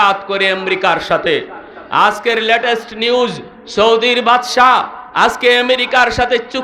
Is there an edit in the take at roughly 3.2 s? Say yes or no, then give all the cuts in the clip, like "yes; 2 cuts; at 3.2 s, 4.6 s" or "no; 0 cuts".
no; 0 cuts